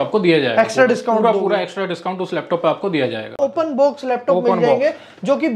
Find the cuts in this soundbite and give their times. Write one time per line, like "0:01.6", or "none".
0:03.3